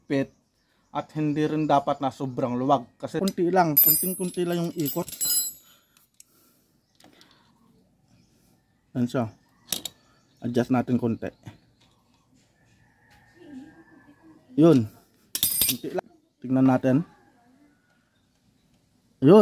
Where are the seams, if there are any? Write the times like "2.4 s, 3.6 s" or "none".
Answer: 3.2 s, 16.0 s